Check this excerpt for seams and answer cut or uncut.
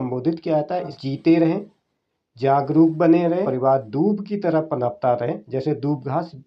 cut